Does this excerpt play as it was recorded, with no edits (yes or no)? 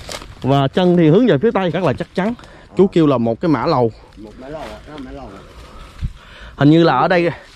no